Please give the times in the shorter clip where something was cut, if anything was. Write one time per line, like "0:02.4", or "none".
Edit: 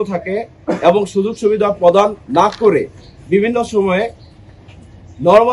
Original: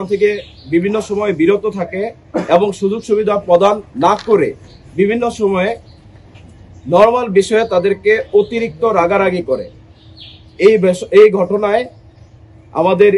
none